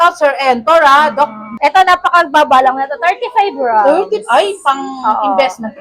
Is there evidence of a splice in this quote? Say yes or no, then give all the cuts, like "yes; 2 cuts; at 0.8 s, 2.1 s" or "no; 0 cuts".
yes; 1 cut; at 1.4 s